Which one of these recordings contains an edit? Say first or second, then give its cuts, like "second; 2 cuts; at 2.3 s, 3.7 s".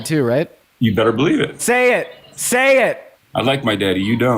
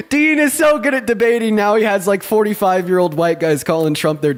first; 1 cut; at 1.6 s